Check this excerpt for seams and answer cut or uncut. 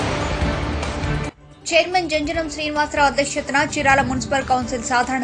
cut